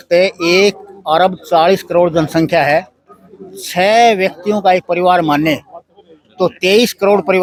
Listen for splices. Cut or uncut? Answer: uncut